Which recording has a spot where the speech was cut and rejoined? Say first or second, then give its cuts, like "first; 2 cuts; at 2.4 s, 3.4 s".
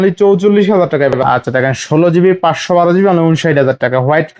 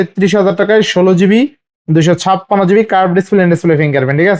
first; 1 cut; at 1.1 s